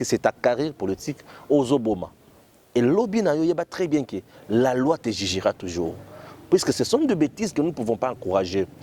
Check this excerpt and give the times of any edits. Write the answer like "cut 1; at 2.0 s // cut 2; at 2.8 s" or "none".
none